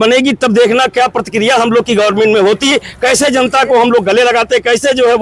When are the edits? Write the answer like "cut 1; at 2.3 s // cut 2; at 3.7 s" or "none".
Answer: none